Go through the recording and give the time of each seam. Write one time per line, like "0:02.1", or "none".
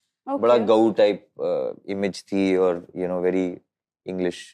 none